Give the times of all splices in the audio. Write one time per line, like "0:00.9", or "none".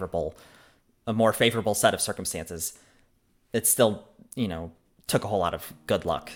none